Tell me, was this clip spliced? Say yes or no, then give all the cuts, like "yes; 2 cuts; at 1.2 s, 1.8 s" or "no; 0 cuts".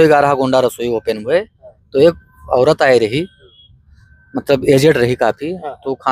no; 0 cuts